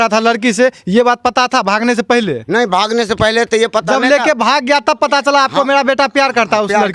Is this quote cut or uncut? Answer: uncut